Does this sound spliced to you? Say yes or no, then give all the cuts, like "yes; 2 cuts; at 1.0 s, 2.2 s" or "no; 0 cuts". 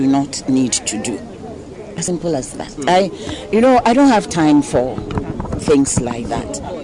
no; 0 cuts